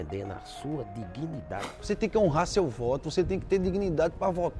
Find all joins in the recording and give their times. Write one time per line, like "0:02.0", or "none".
0:01.7